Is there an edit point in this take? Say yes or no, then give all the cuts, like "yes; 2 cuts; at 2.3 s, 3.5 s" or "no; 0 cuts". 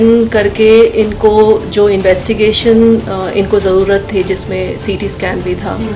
no; 0 cuts